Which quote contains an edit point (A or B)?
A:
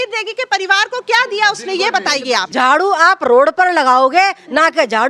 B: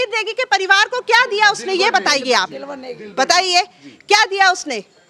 A